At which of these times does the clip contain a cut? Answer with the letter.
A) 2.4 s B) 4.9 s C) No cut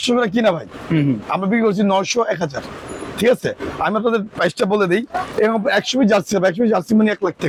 C